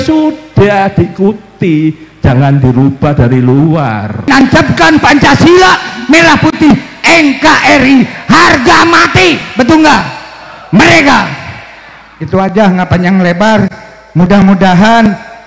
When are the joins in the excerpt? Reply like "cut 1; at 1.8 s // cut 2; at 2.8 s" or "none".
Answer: cut 1; at 4.3 s